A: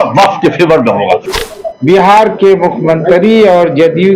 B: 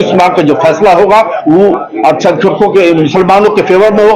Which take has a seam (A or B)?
A